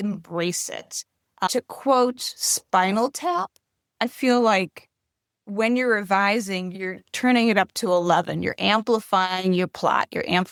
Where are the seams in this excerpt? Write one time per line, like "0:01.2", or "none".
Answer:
none